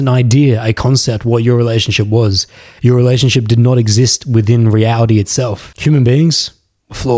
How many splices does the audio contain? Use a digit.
1